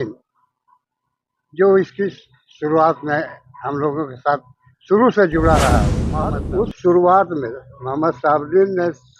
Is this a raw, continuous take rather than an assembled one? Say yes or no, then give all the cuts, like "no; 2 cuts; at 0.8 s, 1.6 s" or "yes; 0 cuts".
no; 1 cut; at 6.0 s